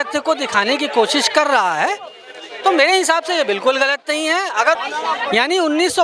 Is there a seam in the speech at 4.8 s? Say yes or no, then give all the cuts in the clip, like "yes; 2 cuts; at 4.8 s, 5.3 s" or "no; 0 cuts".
yes; 1 cut; at 4.8 s